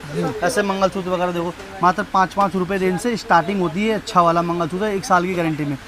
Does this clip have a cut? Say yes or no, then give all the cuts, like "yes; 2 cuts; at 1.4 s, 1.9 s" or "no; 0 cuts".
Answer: no; 0 cuts